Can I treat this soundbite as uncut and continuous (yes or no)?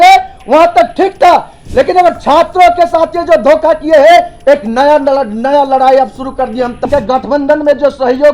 no